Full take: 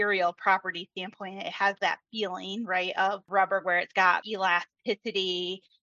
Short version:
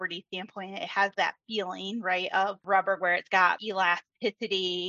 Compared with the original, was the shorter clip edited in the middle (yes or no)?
no